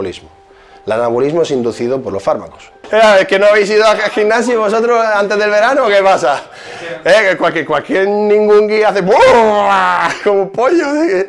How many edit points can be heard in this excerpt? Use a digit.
1